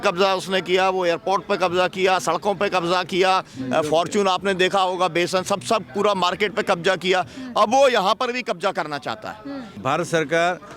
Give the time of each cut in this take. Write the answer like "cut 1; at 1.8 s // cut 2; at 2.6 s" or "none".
cut 1; at 9.8 s